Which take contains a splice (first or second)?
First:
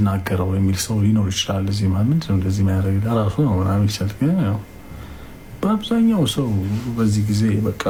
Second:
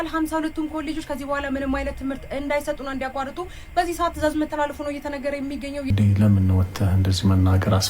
second